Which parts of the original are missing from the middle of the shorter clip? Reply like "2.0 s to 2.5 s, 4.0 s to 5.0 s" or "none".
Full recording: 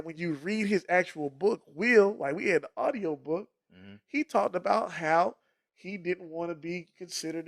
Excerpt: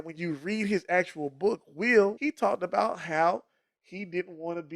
2.2 s to 4.1 s